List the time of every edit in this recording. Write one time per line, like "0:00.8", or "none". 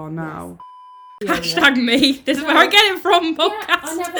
0:01.1